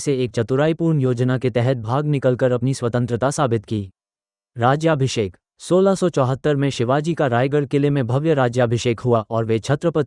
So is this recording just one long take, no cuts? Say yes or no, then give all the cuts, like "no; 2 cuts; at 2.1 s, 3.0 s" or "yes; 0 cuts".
yes; 0 cuts